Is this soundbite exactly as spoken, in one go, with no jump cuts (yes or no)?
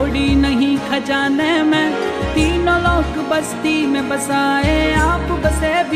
yes